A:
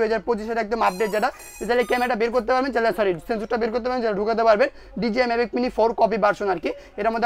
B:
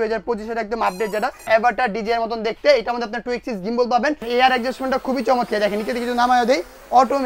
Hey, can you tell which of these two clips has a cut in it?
B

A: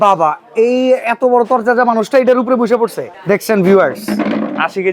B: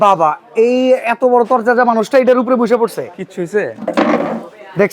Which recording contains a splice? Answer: A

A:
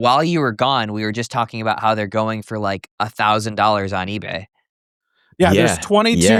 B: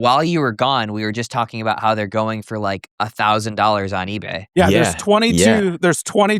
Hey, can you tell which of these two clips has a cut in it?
B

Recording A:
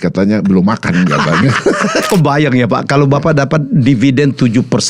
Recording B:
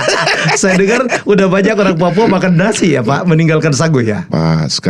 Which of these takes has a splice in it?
A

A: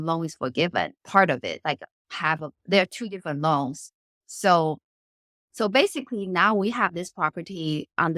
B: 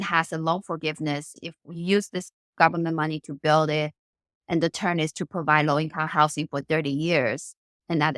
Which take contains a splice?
B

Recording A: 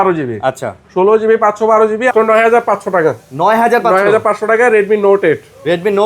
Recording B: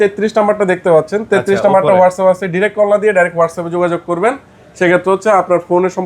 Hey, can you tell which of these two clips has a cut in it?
A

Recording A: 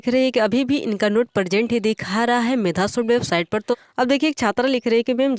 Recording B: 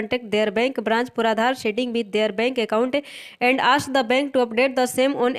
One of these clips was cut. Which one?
A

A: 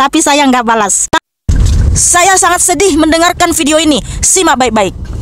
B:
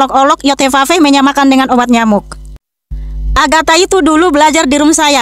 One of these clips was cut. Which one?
A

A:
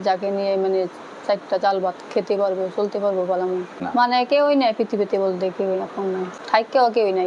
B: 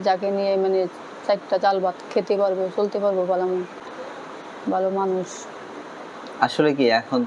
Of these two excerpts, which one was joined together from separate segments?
A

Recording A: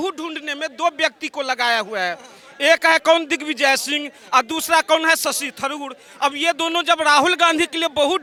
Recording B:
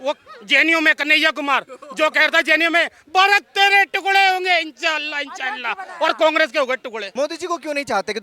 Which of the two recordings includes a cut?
B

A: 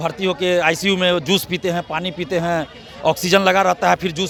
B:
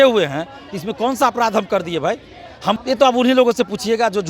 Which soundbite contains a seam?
B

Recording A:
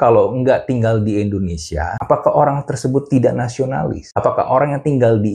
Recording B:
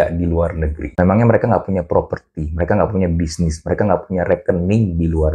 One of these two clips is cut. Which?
A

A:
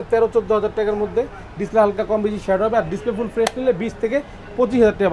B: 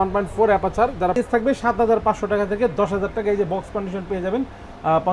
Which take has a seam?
B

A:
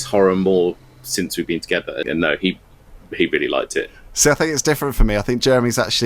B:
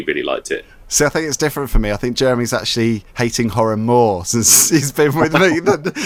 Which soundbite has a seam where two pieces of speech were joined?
A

